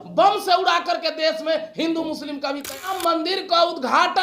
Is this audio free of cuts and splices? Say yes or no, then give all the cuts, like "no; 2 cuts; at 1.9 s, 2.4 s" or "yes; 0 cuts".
no; 1 cut; at 2.8 s